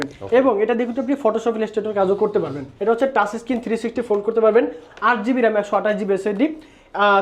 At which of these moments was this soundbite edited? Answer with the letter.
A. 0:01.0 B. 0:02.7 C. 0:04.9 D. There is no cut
B